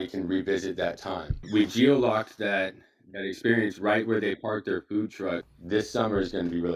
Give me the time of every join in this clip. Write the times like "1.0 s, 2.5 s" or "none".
1.4 s, 5.5 s